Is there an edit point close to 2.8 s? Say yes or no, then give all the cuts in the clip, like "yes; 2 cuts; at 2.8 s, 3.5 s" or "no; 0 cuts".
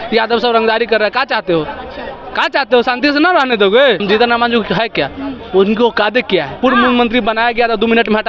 no; 2 cuts; at 4.0 s, 6.5 s